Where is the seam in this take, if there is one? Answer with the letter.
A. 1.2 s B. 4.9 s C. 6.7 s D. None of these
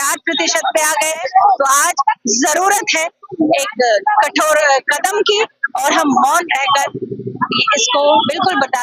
A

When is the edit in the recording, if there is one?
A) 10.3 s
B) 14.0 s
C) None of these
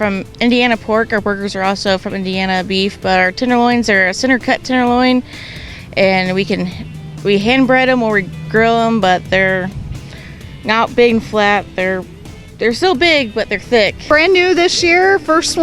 B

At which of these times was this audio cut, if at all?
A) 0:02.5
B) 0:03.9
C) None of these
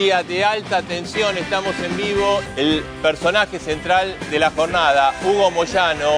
A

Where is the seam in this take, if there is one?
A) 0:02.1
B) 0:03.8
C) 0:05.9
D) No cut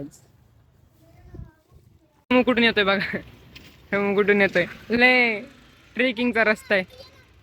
A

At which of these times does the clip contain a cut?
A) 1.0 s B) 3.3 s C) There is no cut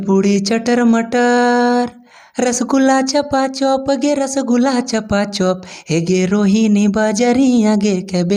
C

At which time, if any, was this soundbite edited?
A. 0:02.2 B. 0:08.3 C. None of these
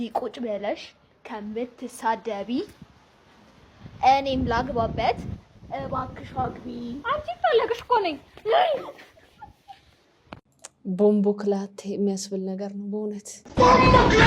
C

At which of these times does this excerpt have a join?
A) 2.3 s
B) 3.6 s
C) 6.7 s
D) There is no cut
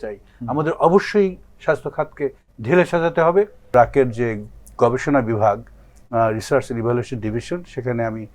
B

